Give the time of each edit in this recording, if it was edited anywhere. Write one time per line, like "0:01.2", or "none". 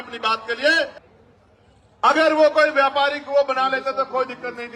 0:01.0